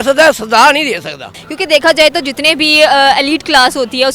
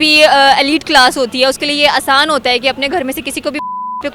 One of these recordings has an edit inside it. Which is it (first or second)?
first